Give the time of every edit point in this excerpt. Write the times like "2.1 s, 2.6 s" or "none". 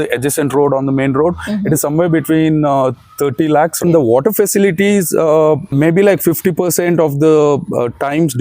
3.8 s, 5.7 s